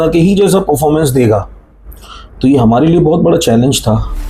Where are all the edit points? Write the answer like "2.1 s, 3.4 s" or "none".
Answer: none